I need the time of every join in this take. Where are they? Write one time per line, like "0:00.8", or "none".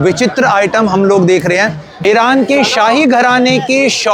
0:01.9